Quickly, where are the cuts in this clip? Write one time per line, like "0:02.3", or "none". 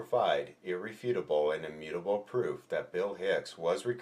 0:03.0